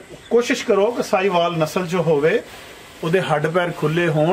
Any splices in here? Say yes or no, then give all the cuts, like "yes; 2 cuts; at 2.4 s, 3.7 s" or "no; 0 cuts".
no; 0 cuts